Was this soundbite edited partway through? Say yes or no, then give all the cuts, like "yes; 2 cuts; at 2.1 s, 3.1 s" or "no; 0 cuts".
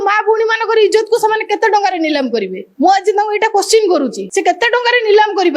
yes; 2 cuts; at 2.6 s, 4.2 s